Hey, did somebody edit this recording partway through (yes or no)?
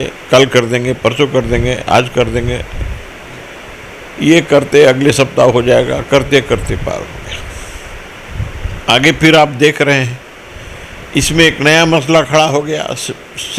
no